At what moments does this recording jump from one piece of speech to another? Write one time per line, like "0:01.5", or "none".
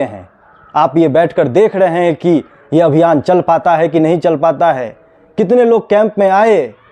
none